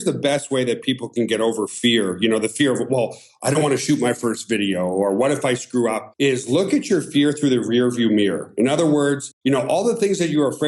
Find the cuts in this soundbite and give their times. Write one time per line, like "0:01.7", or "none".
none

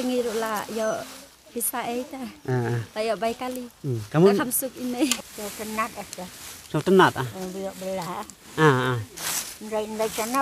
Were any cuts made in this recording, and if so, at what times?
0:05.2

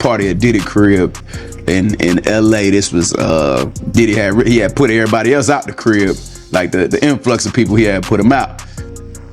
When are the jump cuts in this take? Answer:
0:03.8

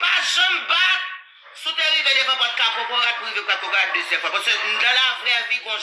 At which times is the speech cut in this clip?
none

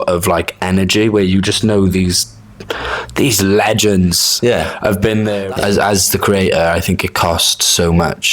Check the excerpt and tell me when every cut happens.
0:05.4

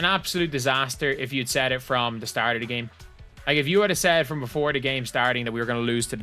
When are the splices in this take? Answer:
none

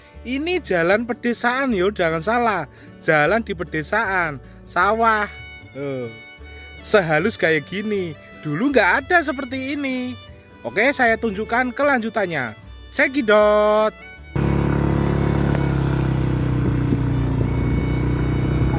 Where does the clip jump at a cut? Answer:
none

